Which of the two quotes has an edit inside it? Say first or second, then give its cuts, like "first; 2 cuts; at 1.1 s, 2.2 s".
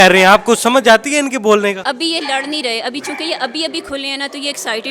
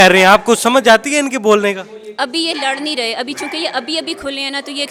first; 1 cut; at 1.8 s